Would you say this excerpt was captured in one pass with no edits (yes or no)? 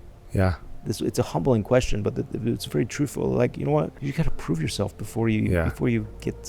no